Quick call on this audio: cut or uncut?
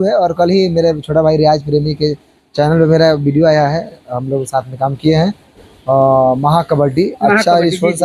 uncut